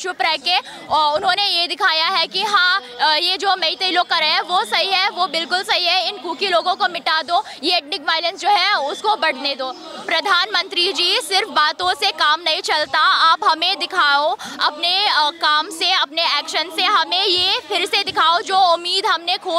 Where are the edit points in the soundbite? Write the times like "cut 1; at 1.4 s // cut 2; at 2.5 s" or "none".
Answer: cut 1; at 9.7 s